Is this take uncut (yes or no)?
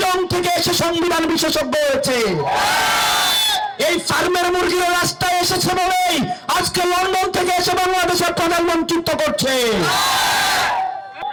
yes